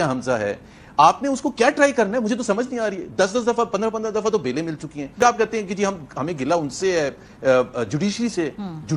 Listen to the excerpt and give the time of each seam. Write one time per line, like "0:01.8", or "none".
0:05.2